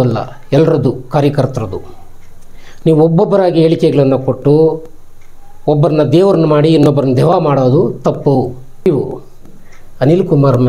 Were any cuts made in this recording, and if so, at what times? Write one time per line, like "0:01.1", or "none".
0:08.9